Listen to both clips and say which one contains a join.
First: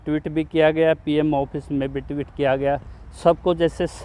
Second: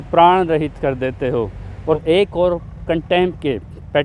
second; 1 cut; at 2.0 s

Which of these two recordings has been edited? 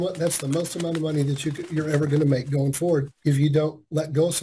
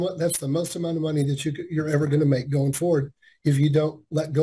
first; 1 cut; at 3.1 s

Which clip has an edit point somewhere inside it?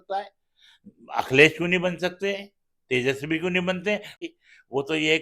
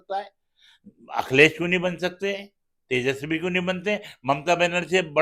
first; 1 cut; at 4.1 s

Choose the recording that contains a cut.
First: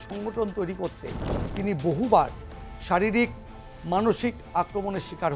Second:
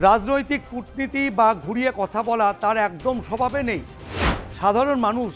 second; 1 cut; at 4.3 s

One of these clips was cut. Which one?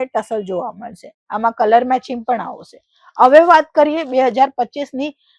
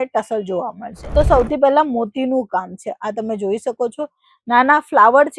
second; 1 cut; at 0.9 s

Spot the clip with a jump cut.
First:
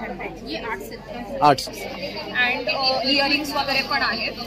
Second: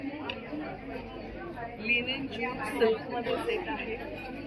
first; 1 cut; at 1.6 s

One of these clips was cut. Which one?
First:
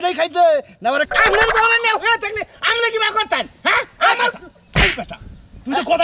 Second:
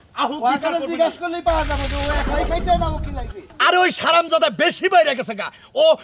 first; 1 cut; at 1.1 s

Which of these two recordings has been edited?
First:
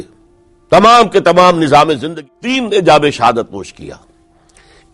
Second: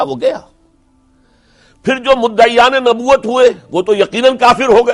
first; 1 cut; at 2.1 s

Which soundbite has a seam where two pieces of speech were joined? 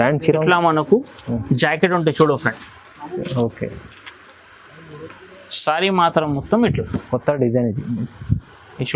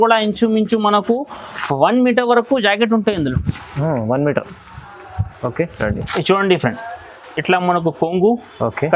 second; 1 cut; at 5.7 s

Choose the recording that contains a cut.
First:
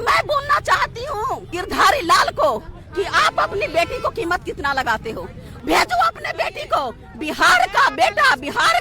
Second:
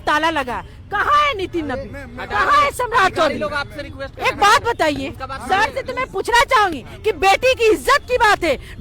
first; 2 cuts; at 1.5 s, 5.5 s

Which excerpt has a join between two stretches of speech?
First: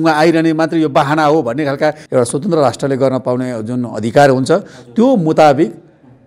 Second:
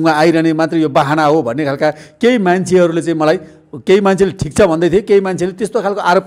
first; 1 cut; at 2.0 s

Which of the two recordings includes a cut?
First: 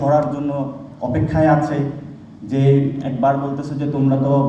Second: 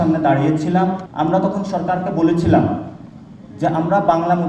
second; 1 cut; at 1.0 s

